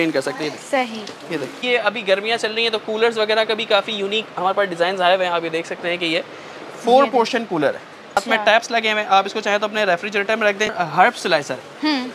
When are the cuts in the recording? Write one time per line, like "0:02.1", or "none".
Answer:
0:01.6
0:08.2
0:10.7